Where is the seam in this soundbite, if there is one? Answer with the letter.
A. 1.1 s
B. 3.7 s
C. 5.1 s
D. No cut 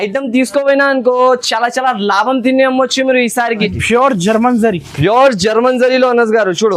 B